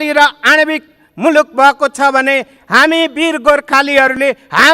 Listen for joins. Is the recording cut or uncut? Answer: uncut